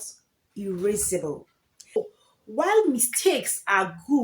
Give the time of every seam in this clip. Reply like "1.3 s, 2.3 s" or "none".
2.0 s